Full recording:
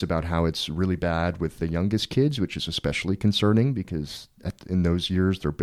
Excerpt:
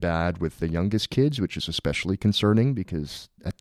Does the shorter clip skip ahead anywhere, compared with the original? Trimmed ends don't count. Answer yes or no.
no